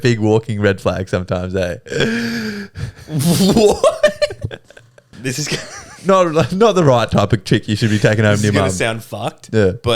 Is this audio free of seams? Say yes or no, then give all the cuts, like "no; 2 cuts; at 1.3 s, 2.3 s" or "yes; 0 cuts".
no; 1 cut; at 5.1 s